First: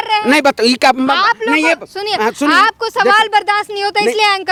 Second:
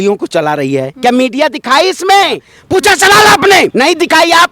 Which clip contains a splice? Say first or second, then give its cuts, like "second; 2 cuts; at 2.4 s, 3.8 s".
second; 3 cuts; at 0.9 s, 2.5 s, 3.7 s